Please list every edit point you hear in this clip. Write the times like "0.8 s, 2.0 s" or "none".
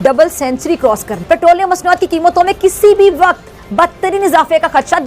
1.1 s